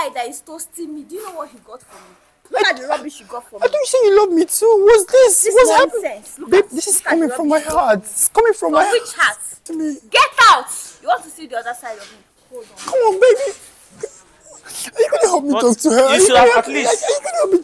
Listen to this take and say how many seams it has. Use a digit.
2